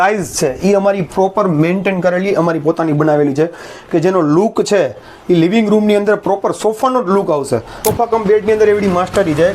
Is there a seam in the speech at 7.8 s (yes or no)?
yes